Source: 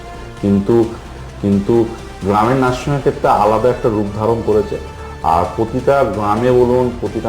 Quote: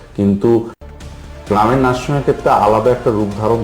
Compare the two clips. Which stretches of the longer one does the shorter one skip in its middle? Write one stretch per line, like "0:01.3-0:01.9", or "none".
0:01.4-0:01.9